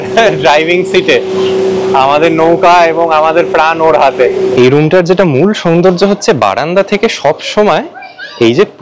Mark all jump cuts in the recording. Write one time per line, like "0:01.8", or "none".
0:04.5

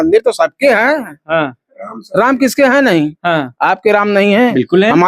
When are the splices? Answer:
none

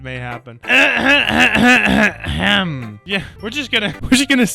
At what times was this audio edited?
none

